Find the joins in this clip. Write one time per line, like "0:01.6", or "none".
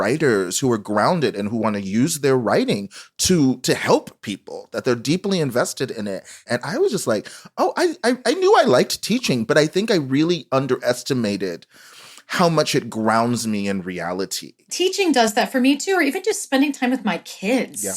0:06.5
0:14.7